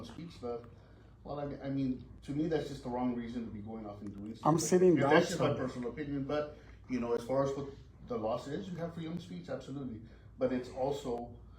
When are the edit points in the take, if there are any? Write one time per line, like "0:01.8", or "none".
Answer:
none

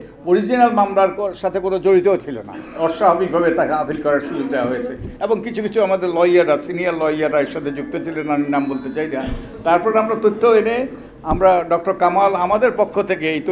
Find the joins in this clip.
none

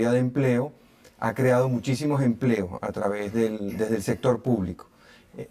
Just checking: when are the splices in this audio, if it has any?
0:04.3

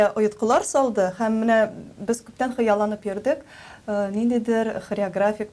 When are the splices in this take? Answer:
none

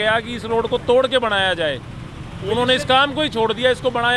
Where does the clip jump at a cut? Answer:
none

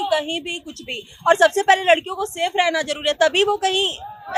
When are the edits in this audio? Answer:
none

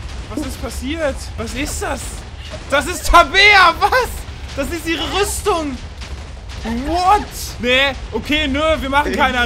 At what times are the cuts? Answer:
0:01.3
0:07.4

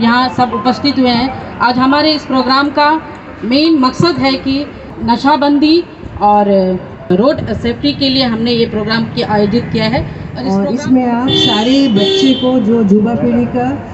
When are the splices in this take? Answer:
0:04.9
0:07.1
0:10.4

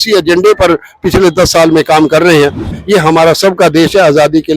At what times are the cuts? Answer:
0:02.8

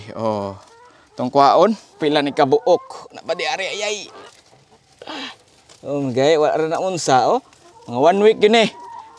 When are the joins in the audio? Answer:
0:01.9

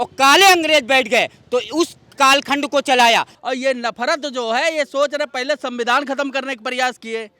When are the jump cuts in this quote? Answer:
0:03.4

